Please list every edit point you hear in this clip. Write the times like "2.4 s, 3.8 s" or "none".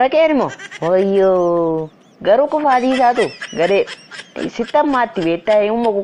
none